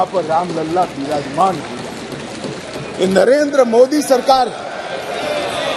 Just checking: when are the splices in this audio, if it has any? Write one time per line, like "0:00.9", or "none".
none